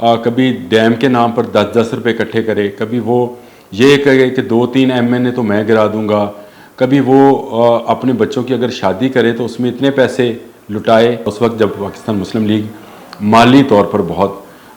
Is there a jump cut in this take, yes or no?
yes